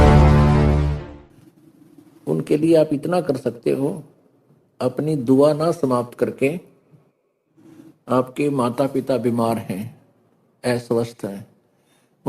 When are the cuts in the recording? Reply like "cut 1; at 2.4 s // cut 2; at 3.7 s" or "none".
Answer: cut 1; at 0.9 s

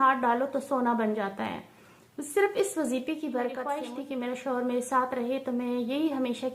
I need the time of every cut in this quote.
cut 1; at 3.7 s

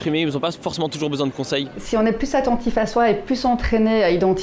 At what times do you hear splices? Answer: cut 1; at 1.8 s

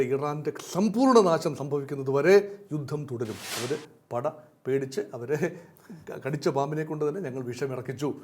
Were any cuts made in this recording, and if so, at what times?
cut 1; at 3.5 s

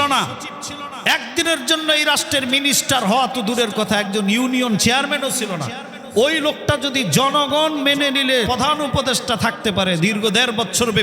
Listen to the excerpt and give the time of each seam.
cut 1; at 8.5 s

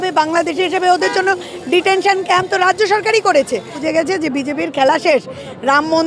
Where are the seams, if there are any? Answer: cut 1; at 3.8 s

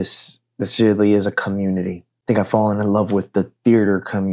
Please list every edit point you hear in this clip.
cut 1; at 2.1 s

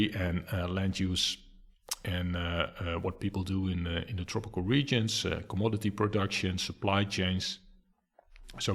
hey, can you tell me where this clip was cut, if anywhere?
none

